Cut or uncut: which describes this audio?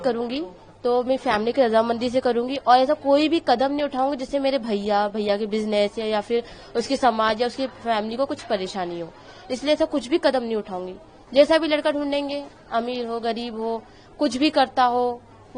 uncut